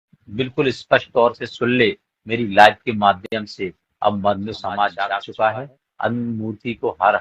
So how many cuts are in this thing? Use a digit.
1